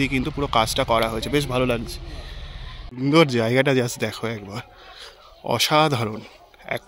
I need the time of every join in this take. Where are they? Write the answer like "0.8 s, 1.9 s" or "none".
2.8 s